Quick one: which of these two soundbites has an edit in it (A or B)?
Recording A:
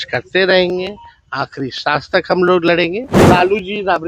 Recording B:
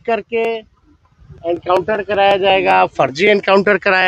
A